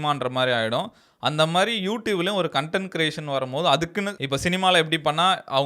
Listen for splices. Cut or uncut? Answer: uncut